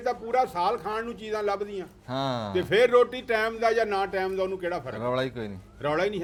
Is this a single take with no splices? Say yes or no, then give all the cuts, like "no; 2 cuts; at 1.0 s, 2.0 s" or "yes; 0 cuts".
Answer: yes; 0 cuts